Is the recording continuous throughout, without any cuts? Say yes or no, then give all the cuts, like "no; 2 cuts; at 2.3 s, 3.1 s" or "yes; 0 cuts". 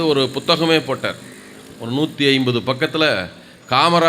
yes; 0 cuts